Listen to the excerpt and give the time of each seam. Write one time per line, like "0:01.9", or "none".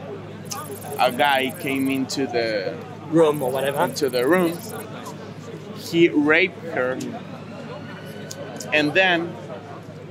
none